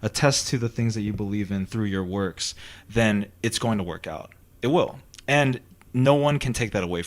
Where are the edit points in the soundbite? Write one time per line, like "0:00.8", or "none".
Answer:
none

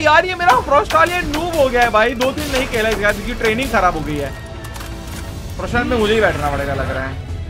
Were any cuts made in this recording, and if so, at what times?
none

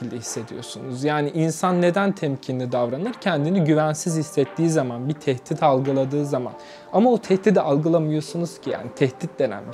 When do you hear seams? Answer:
none

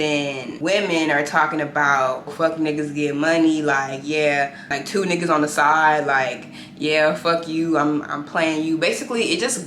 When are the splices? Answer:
0:02.3
0:04.7

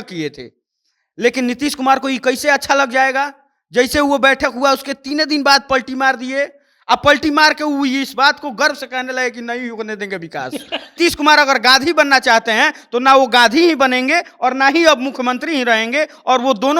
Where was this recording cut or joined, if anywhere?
0:10.9

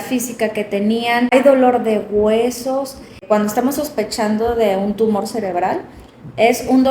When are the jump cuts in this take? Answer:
0:01.3
0:03.2

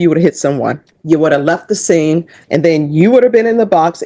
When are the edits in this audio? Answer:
0:00.9
0:02.4

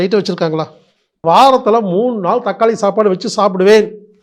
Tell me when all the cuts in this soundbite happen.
0:01.2

